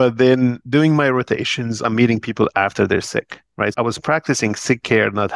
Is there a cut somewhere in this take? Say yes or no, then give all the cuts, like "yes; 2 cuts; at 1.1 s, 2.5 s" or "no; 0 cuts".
yes; 2 cuts; at 1.8 s, 3.7 s